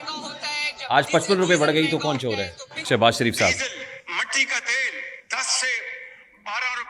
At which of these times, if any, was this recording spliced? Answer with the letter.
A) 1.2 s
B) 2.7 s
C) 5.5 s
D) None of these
B